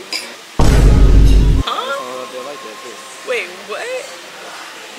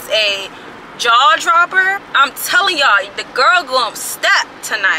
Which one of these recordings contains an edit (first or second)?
second